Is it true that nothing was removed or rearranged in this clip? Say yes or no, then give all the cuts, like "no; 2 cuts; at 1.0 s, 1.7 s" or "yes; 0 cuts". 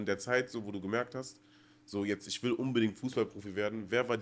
yes; 0 cuts